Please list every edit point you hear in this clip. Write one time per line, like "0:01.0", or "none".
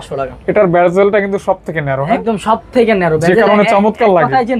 none

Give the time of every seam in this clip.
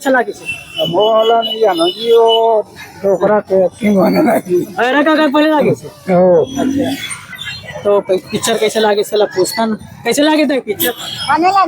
0:07.4

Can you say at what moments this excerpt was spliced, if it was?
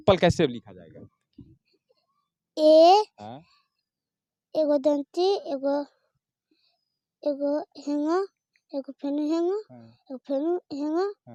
none

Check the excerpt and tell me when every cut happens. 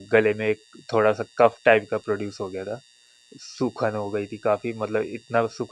none

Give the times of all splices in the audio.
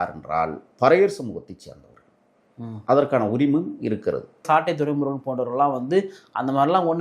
0:04.4

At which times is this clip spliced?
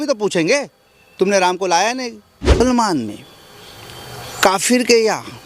0:02.6

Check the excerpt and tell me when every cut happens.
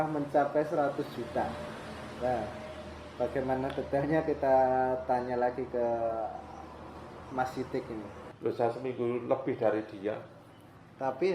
0:08.2

